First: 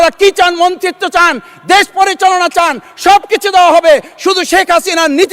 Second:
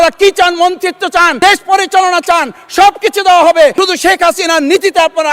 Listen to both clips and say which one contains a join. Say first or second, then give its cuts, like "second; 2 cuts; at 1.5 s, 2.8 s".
second; 2 cuts; at 1.3 s, 3.7 s